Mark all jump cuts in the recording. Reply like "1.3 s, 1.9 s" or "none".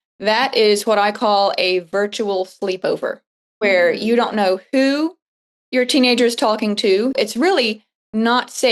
3.5 s, 7.2 s